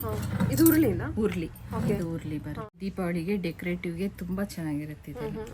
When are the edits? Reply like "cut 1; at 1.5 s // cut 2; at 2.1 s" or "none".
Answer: cut 1; at 2.8 s